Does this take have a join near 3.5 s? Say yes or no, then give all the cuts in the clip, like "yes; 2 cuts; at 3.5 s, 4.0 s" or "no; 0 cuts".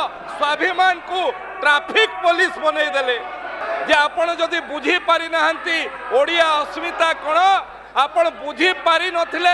yes; 1 cut; at 3.5 s